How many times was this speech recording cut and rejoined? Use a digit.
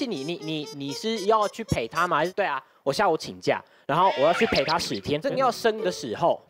2